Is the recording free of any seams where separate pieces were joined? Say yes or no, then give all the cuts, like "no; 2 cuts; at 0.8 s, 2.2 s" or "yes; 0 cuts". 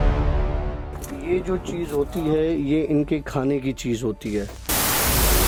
yes; 0 cuts